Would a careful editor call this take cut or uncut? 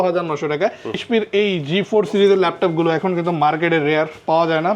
cut